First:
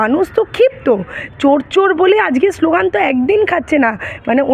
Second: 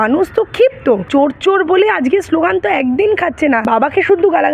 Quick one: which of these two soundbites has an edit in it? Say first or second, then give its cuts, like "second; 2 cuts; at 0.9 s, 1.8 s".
second; 2 cuts; at 1.0 s, 3.6 s